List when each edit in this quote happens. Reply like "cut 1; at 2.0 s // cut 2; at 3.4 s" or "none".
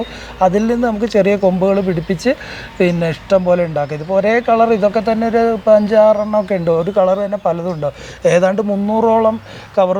none